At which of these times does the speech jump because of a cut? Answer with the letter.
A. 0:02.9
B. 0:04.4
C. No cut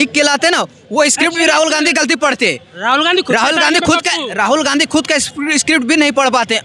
C